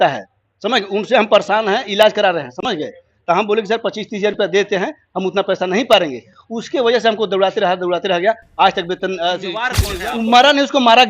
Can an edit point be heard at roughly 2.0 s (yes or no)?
no